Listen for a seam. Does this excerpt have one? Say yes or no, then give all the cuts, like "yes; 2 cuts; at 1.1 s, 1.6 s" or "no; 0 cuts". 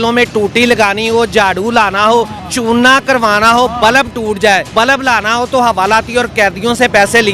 yes; 2 cuts; at 2.4 s, 4.7 s